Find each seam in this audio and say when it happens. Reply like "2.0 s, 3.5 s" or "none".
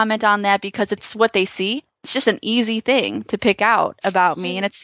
1.1 s, 2.1 s